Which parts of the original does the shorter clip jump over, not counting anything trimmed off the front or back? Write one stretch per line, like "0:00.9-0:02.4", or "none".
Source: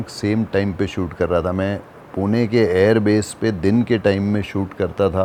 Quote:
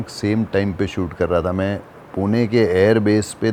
none